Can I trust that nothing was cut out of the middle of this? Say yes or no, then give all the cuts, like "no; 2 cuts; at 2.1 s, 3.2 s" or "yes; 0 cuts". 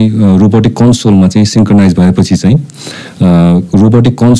yes; 0 cuts